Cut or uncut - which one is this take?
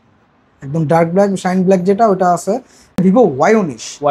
cut